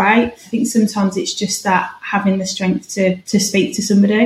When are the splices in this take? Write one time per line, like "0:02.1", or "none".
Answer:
0:03.2